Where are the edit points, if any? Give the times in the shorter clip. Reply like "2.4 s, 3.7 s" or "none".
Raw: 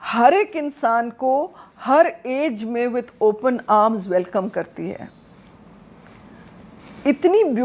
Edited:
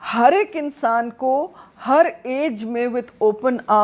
none